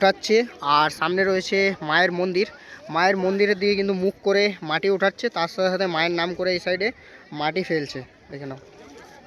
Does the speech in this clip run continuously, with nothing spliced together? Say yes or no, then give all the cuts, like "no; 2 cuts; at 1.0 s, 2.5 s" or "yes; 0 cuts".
yes; 0 cuts